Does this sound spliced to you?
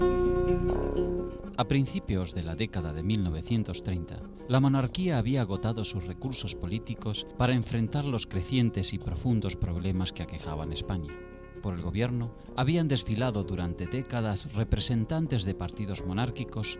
yes; 1 cut; at 0.9 s

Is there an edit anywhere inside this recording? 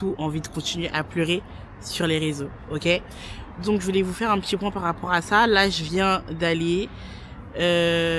no; 0 cuts

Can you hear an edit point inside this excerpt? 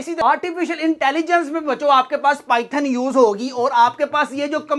no; 0 cuts

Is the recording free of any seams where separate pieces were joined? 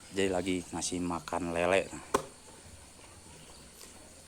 yes; 0 cuts

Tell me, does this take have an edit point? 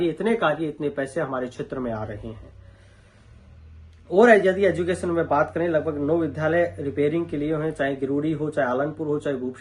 no; 0 cuts

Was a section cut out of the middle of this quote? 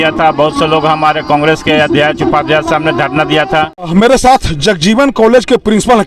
yes; 1 cut; at 3.9 s

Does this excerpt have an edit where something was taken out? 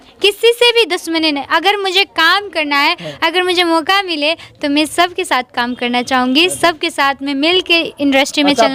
no; 0 cuts

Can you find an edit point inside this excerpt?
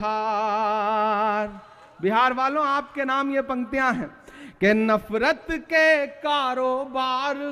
no; 0 cuts

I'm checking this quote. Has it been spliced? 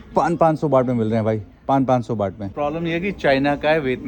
no; 0 cuts

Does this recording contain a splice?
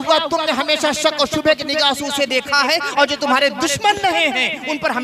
no; 0 cuts

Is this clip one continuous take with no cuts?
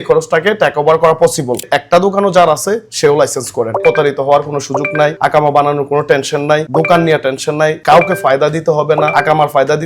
no; 2 cuts; at 1.6 s, 3.8 s

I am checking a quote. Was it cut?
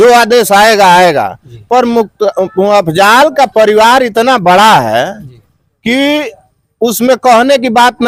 no; 0 cuts

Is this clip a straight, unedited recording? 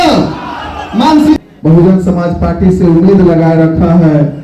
no; 1 cut; at 1.4 s

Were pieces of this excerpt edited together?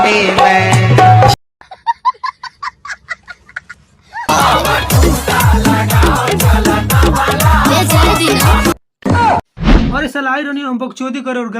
no; 0 cuts

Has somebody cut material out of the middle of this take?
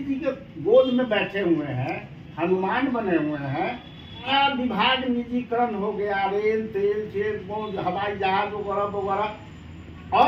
yes; 1 cut; at 4.3 s

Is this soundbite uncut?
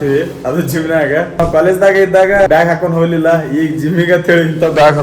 no; 2 cuts; at 1.4 s, 2.5 s

